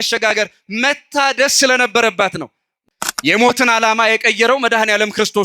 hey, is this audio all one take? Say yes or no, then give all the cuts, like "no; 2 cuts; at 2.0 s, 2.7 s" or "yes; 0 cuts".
no; 1 cut; at 2.9 s